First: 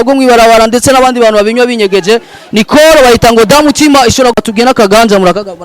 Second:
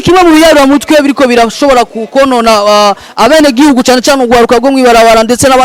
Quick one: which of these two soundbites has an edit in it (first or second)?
first